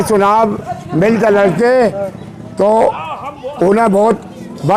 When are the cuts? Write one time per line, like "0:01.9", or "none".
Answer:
none